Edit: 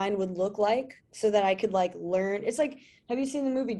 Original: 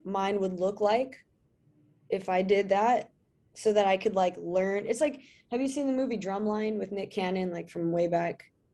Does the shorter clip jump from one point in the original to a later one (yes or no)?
yes